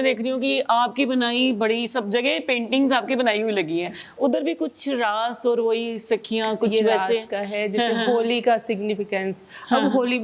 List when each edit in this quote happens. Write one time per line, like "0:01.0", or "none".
none